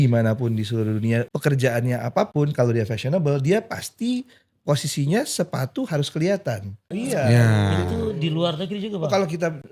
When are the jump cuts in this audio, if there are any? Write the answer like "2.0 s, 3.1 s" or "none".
1.3 s, 6.8 s